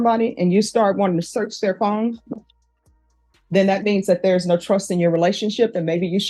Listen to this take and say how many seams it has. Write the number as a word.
zero